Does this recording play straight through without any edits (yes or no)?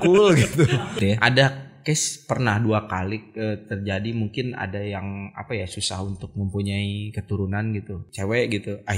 no